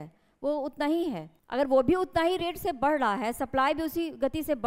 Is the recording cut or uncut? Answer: cut